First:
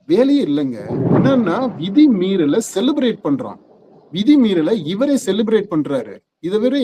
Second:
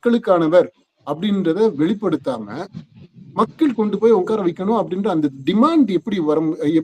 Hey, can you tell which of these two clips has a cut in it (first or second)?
first